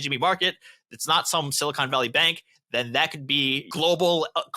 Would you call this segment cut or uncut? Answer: cut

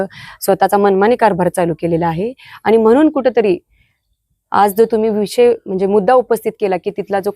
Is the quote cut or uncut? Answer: uncut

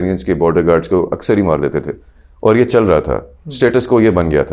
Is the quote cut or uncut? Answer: uncut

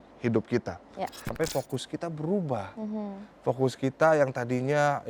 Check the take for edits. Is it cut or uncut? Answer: cut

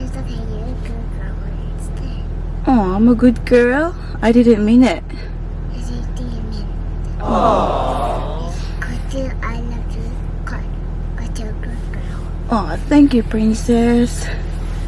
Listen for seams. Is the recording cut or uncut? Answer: uncut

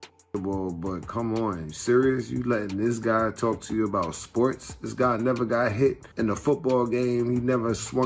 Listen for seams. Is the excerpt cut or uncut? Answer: cut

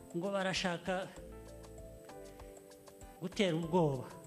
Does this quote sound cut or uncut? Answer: uncut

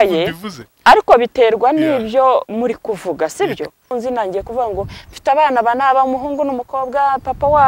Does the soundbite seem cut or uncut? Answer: cut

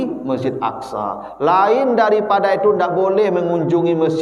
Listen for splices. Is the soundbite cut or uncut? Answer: uncut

